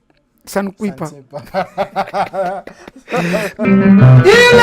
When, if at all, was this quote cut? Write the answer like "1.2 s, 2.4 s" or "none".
3.6 s